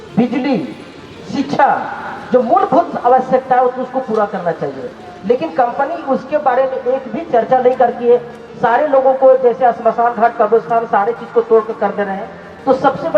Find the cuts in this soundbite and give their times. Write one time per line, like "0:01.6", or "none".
none